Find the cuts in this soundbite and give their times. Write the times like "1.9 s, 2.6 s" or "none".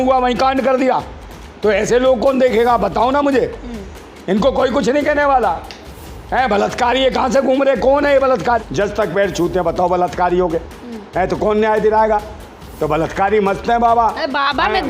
8.5 s